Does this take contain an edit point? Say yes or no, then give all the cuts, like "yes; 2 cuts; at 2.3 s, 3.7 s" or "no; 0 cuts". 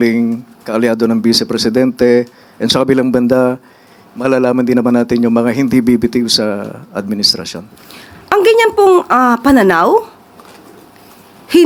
no; 0 cuts